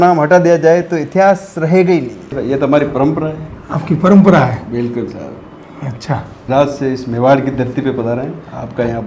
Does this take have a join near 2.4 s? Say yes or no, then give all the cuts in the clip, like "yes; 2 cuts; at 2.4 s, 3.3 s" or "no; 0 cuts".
yes; 2 cuts; at 2.4 s, 6.5 s